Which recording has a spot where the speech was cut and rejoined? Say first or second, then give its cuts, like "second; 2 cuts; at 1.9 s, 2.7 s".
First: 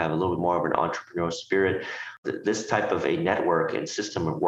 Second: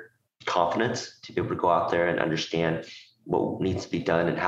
first; 1 cut; at 2.2 s